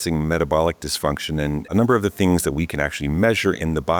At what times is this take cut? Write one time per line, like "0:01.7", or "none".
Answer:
0:01.7